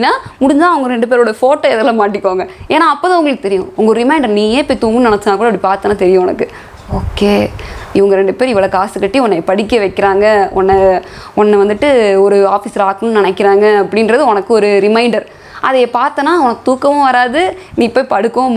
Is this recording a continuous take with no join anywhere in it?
yes; 0 cuts

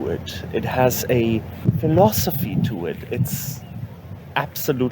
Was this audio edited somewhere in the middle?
yes; 1 cut; at 1.5 s

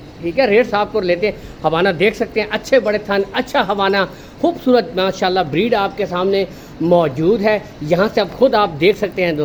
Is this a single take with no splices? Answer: yes; 0 cuts

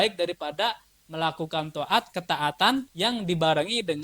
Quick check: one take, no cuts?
no; 1 cut; at 2.9 s

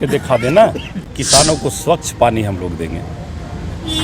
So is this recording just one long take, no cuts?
no; 1 cut; at 1.0 s

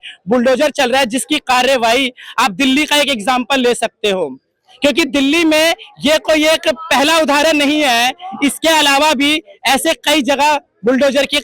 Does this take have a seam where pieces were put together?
no; 0 cuts

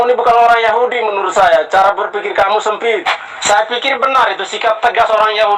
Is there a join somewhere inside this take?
yes; 1 cut; at 3.1 s

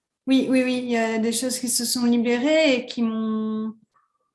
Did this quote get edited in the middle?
no; 0 cuts

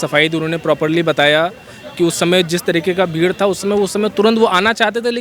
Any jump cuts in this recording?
no; 0 cuts

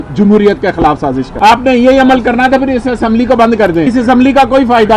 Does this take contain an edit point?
yes; 2 cuts; at 1.3 s, 3.9 s

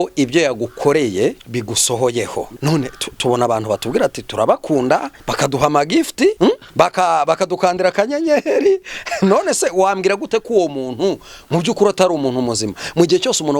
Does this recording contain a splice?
yes; 4 cuts; at 1.4 s, 2.5 s, 5.2 s, 6.5 s

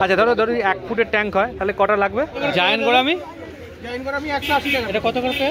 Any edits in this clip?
yes; 1 cut; at 2.3 s

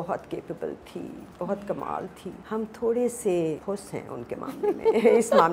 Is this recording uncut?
no; 2 cuts; at 2.3 s, 3.6 s

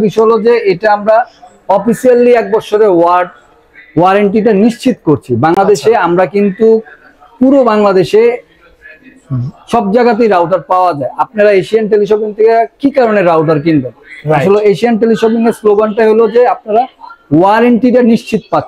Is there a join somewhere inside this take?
no; 0 cuts

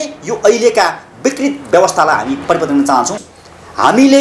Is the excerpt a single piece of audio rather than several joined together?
no; 1 cut; at 3.2 s

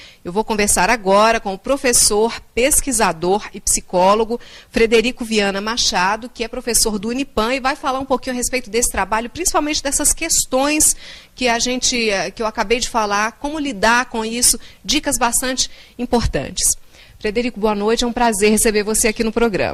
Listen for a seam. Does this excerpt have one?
no; 0 cuts

